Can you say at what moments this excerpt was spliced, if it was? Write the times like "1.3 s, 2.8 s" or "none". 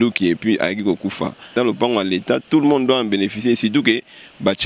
1.5 s